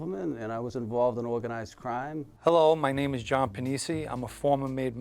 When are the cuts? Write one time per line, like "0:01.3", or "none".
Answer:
0:02.3